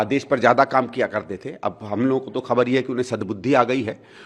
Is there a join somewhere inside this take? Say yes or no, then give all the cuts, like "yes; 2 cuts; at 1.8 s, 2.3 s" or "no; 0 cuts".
no; 0 cuts